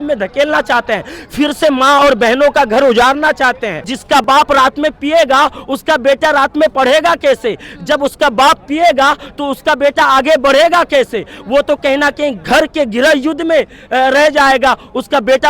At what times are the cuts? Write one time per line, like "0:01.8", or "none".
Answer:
0:03.9
0:12.4

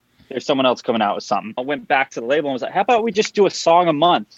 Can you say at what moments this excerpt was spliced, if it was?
0:01.6

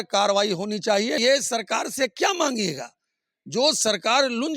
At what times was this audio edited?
0:01.2

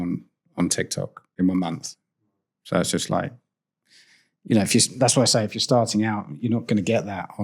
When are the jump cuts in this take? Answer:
0:01.2

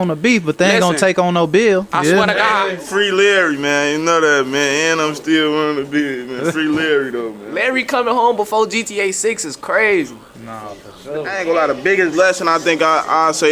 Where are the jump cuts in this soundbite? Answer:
0:02.8
0:07.4
0:11.3

